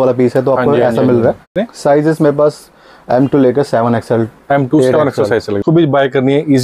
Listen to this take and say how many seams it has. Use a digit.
2